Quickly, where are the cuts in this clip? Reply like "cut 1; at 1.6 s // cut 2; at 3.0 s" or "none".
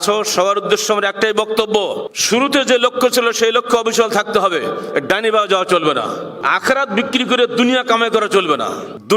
cut 1; at 2.1 s